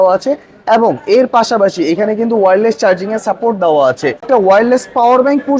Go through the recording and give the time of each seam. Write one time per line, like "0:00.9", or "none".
0:04.2

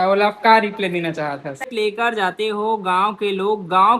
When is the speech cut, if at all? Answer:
0:01.7

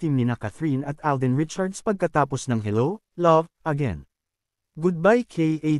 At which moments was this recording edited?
0:04.6

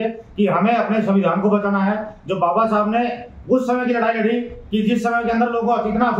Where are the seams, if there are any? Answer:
none

